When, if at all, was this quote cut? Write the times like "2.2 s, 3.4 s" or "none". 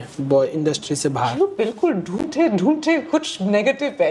none